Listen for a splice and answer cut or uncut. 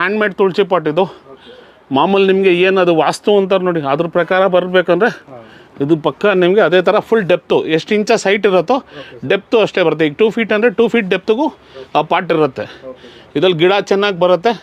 uncut